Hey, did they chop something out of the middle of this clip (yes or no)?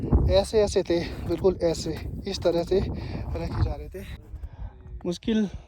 yes